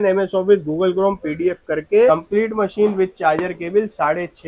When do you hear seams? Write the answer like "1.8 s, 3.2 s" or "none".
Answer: 2.1 s